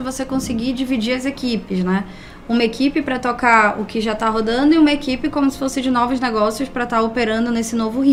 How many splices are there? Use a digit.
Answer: 0